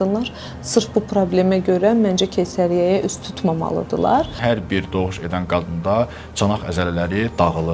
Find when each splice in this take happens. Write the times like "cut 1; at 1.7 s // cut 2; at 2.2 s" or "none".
cut 1; at 4.4 s

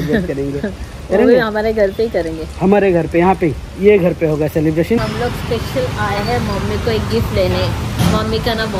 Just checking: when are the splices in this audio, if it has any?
cut 1; at 5.1 s

